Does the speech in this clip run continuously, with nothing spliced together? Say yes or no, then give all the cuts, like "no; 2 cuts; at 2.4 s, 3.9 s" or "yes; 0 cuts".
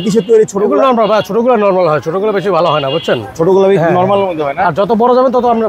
yes; 0 cuts